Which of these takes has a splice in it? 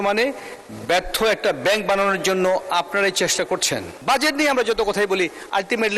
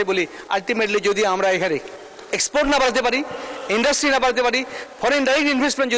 first; 1 cut; at 3.9 s

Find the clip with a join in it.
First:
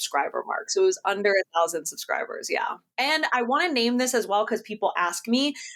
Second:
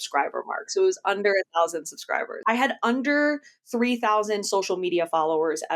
second; 1 cut; at 2.3 s

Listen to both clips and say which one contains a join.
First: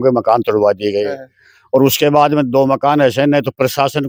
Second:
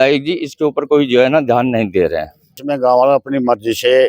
second; 1 cut; at 2.5 s

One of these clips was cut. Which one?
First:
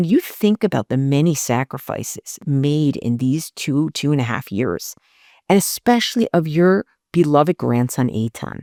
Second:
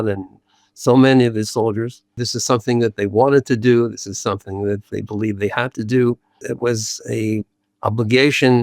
second; 2 cuts; at 2.3 s, 6.5 s

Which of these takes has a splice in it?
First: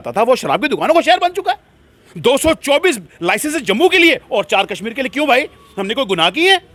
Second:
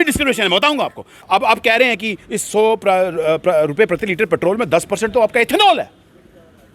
second; 1 cut; at 1.2 s

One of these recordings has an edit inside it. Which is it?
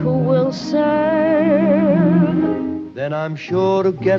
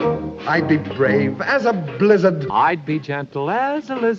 first; 1 cut; at 2.5 s

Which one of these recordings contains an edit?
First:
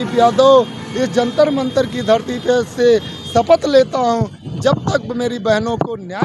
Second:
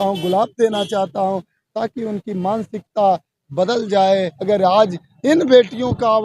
second; 1 cut; at 4.3 s

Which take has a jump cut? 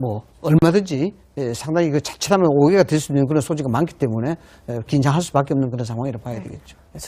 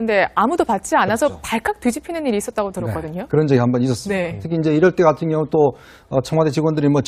first; 1 cut; at 2.4 s

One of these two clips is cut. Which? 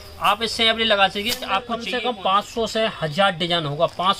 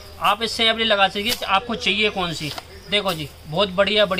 first; 1 cut; at 1.8 s

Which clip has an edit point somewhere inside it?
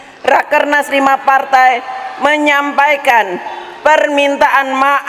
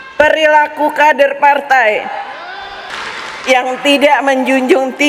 second; 1 cut; at 2.9 s

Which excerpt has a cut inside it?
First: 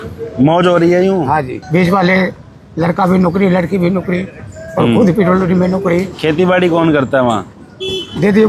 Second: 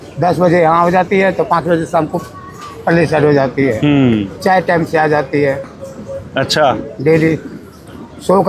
first; 1 cut; at 1.6 s

